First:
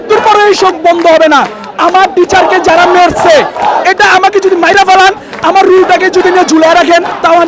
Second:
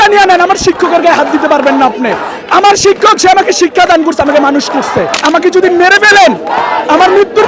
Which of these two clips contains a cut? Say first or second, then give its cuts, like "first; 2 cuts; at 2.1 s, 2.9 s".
second; 1 cut; at 5.2 s